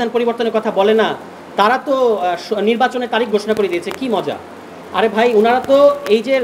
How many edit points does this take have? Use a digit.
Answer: 0